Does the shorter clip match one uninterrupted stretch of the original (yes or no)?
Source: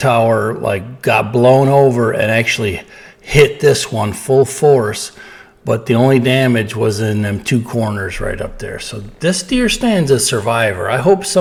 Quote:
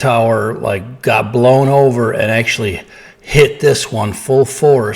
yes